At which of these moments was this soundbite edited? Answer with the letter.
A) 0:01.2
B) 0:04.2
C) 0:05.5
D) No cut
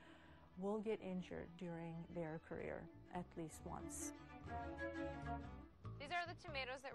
C